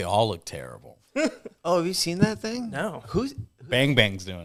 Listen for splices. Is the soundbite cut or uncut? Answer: uncut